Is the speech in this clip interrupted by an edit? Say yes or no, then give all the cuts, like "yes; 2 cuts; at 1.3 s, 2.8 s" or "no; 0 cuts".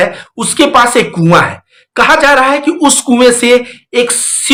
no; 0 cuts